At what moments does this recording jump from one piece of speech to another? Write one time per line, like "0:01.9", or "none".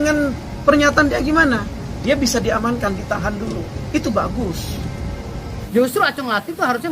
0:05.5